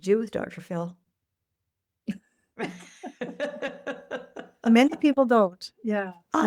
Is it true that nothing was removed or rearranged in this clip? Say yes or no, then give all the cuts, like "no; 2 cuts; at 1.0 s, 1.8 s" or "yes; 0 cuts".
yes; 0 cuts